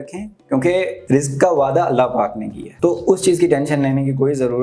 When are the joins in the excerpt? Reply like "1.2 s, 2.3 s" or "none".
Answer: 1.0 s

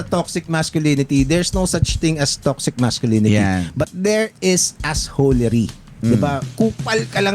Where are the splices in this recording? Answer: none

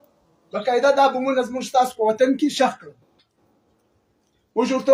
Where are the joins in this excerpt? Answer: none

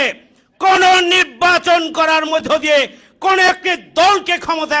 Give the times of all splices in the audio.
none

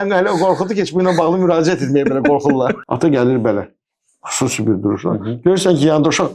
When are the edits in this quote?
2.8 s

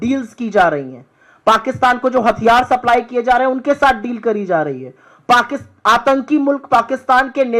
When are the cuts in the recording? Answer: none

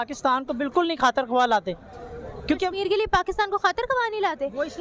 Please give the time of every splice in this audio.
none

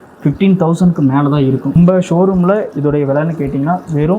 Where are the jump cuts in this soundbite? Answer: 1.7 s

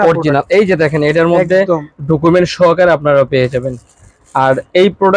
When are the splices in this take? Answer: none

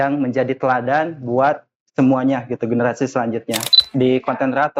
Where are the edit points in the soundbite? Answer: 3.8 s

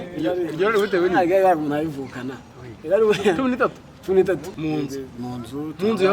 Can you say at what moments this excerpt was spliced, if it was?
4.5 s

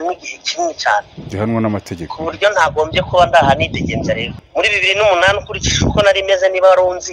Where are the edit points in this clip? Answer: 4.3 s

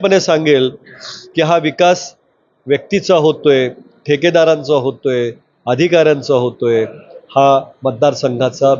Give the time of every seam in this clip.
none

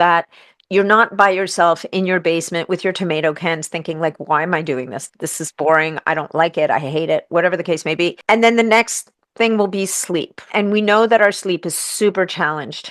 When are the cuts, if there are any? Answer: 8.2 s, 10.5 s

